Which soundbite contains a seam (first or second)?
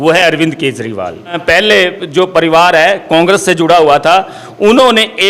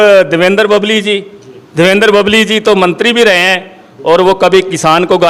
first